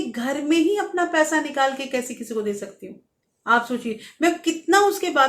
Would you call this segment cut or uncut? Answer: uncut